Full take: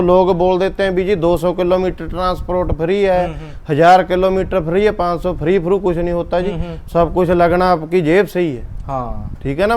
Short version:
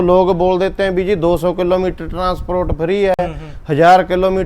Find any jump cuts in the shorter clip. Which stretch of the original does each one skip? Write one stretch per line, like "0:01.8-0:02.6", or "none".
none